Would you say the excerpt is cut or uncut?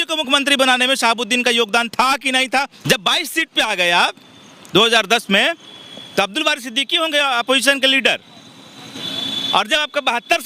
cut